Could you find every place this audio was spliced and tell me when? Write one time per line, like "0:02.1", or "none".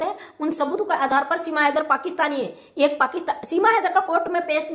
none